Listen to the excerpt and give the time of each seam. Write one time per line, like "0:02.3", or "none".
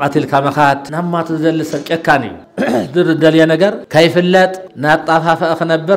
0:00.9
0:02.4
0:03.8
0:04.7